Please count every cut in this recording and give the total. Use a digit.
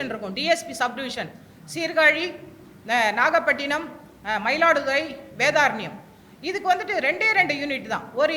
0